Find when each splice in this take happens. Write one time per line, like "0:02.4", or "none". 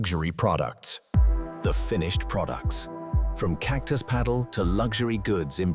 0:01.1